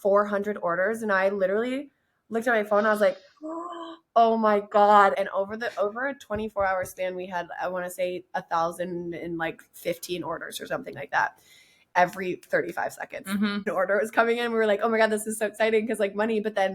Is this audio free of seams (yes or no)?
no